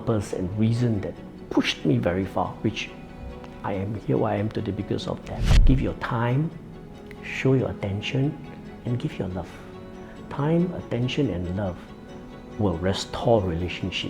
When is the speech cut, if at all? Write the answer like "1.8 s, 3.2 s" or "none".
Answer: 5.5 s